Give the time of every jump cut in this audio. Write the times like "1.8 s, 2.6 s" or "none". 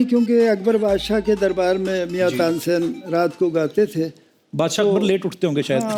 none